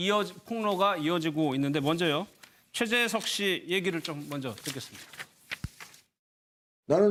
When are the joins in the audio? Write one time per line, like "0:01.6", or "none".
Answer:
none

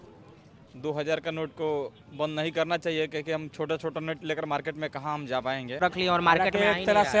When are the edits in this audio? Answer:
0:05.8

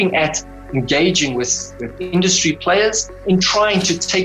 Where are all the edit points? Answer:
0:03.2

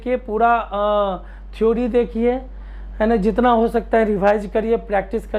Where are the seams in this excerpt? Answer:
none

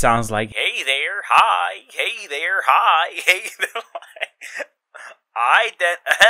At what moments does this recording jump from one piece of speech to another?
none

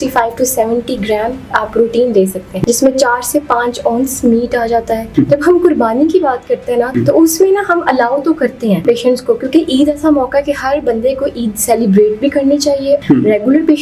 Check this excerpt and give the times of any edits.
0:02.6
0:05.1
0:07.0
0:08.8
0:13.0

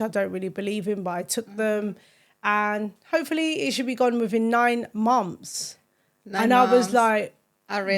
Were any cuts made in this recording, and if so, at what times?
none

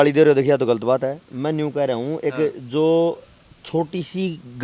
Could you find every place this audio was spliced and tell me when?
none

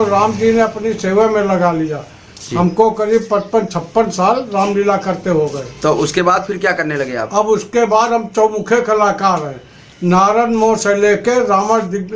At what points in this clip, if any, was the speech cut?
none

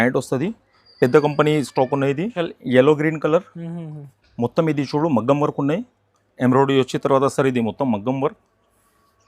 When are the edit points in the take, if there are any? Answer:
0:02.5

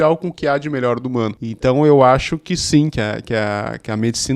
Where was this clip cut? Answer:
0:01.4

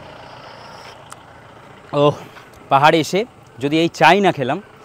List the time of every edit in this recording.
none

